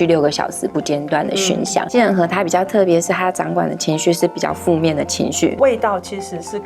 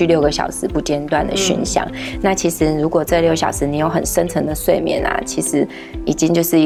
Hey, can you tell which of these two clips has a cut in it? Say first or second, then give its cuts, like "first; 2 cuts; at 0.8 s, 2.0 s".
first; 2 cuts; at 1.9 s, 5.5 s